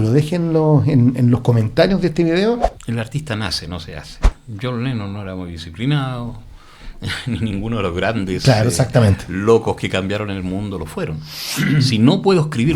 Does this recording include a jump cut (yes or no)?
yes